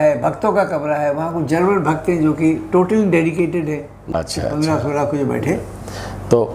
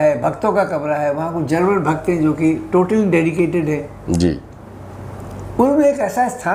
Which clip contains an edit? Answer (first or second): first